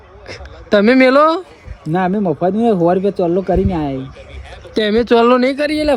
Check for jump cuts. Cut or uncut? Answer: uncut